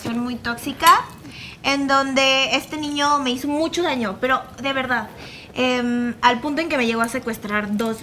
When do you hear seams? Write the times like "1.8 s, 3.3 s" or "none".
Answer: none